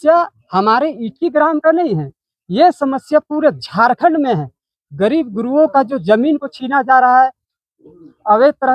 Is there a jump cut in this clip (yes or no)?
no